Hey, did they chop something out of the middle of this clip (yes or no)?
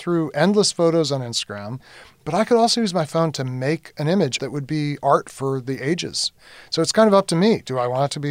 yes